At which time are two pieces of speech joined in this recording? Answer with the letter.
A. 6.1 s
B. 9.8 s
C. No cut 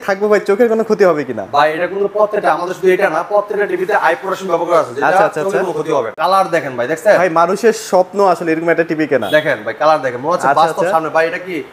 A